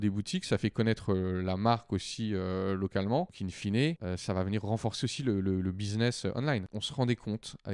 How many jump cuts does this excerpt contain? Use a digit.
3